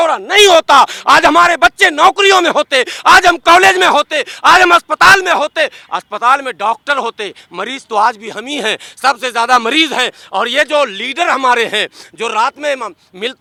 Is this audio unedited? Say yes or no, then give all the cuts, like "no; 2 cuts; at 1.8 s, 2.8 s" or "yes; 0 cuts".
yes; 0 cuts